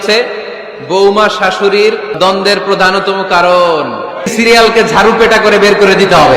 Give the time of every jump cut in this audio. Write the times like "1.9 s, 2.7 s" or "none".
2.2 s, 4.3 s